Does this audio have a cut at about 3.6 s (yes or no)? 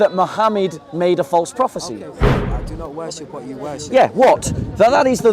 no